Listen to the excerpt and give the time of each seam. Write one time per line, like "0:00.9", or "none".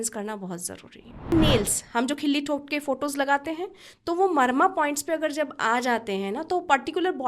0:01.3